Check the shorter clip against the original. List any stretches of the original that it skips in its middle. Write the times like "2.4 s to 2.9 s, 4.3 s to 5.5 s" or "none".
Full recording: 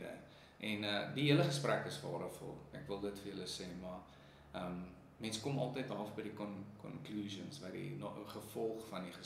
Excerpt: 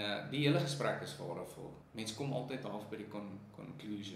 2.6 s to 5.0 s